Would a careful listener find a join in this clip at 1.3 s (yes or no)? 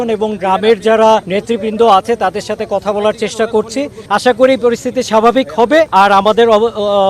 yes